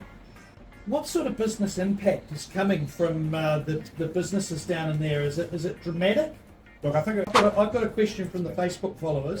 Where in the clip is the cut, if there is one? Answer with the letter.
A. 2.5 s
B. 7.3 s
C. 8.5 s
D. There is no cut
B